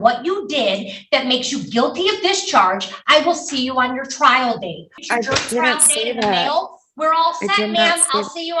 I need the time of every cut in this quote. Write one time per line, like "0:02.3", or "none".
0:04.9